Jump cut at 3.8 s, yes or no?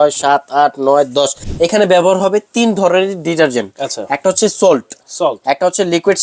no